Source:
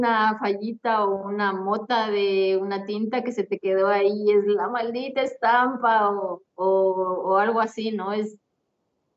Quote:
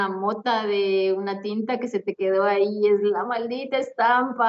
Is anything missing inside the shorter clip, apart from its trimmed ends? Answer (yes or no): no